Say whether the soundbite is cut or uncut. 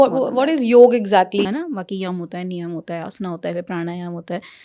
cut